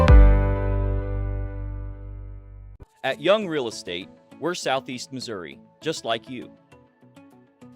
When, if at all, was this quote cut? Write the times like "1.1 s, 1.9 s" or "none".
3.1 s